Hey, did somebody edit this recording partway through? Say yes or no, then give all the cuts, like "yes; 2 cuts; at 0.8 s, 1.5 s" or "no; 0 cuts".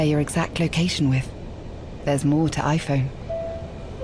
no; 0 cuts